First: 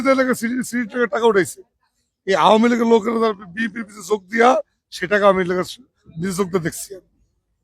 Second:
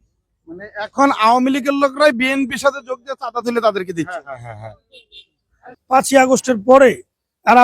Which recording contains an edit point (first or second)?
second